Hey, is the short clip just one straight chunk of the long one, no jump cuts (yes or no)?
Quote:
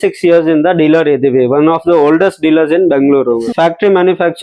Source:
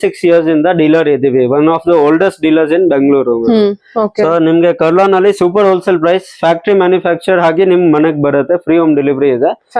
no